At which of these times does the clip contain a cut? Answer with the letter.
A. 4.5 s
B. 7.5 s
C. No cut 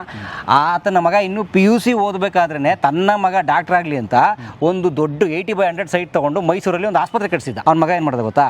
B